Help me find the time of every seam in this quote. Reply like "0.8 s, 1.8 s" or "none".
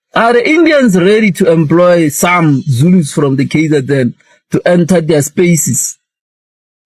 none